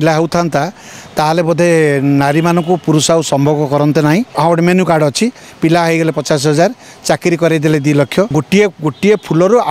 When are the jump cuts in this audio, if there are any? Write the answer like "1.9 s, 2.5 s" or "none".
4.3 s, 8.4 s